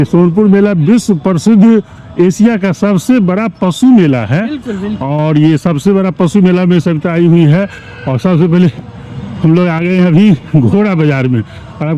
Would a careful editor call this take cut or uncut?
uncut